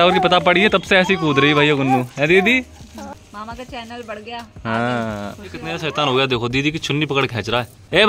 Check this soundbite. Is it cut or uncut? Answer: cut